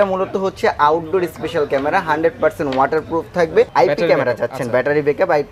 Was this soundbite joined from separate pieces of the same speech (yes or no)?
yes